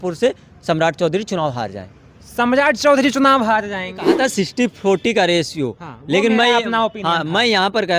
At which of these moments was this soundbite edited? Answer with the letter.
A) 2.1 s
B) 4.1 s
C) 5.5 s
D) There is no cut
B